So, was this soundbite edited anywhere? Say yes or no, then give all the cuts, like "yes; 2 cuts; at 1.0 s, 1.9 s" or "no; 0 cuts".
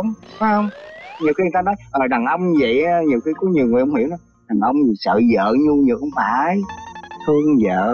no; 0 cuts